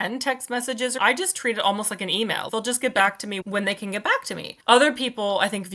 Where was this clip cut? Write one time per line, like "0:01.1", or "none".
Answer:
0:01.0
0:02.5
0:03.4
0:04.5